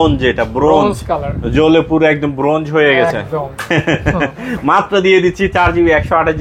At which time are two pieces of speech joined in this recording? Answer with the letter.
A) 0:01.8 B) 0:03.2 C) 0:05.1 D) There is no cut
D